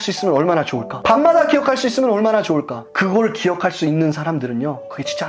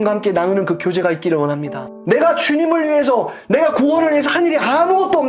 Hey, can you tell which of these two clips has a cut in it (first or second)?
second